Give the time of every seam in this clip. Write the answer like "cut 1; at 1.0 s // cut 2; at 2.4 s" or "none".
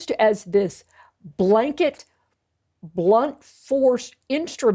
none